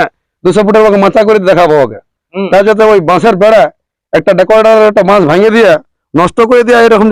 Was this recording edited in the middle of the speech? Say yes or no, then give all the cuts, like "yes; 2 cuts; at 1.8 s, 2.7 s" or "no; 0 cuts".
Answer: no; 0 cuts